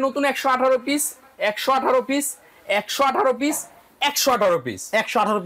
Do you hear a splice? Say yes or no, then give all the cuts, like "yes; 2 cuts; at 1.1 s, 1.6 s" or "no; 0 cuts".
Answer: no; 0 cuts